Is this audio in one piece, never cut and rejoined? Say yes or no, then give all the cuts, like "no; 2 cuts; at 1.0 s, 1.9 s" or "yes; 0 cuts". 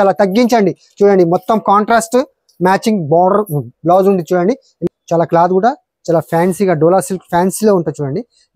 no; 1 cut; at 4.8 s